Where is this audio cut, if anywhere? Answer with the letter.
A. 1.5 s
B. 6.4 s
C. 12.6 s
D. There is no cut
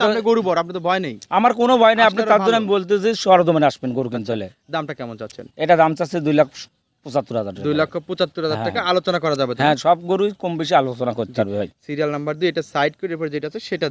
D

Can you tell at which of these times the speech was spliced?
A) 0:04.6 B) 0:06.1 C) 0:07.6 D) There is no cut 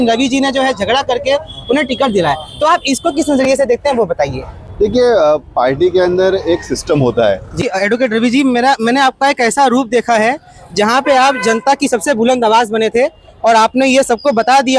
C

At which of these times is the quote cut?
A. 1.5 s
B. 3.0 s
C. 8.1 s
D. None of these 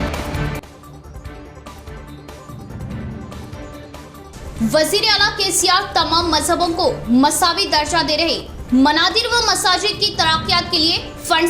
B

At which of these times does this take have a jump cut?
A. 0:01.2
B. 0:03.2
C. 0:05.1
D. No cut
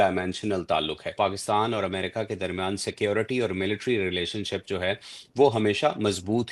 A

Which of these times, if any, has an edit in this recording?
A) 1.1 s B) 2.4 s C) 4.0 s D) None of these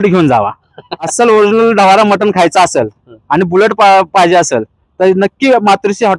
A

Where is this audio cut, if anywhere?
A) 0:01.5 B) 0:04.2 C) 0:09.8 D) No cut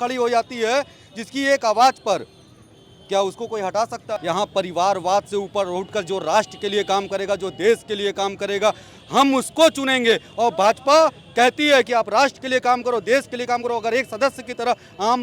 B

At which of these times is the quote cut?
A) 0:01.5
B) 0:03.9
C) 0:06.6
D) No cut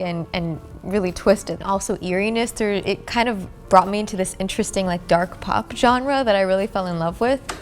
A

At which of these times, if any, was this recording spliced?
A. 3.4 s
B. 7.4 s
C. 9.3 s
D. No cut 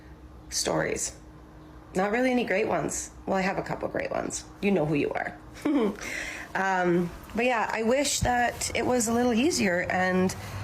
A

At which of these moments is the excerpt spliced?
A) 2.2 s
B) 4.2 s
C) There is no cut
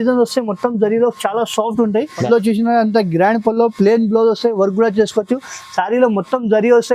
A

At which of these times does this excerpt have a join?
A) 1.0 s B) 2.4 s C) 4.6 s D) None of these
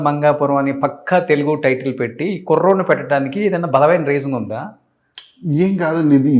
D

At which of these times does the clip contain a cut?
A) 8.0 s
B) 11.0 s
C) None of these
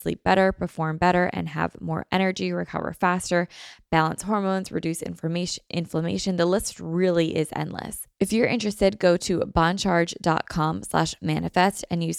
A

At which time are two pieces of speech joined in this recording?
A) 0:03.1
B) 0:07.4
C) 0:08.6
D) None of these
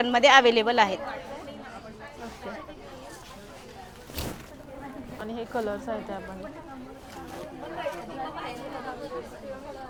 D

